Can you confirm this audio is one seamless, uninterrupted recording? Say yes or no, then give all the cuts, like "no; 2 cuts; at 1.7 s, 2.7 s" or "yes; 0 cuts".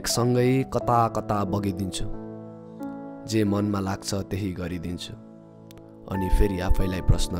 yes; 0 cuts